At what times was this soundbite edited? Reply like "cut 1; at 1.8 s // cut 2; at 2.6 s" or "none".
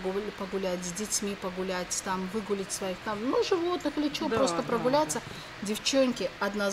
none

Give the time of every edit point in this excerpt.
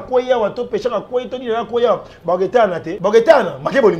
cut 1; at 2.9 s

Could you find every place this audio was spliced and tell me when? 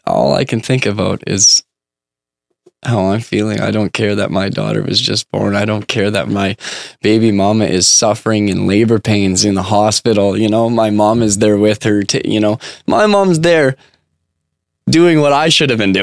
cut 1; at 6.3 s

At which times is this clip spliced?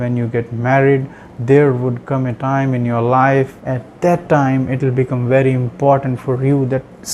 cut 1; at 3.6 s

